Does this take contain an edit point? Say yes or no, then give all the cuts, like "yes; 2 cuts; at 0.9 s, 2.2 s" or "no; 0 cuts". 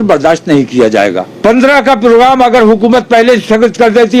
yes; 1 cut; at 1.3 s